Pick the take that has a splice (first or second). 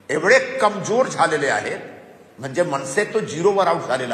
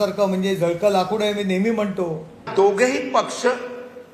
second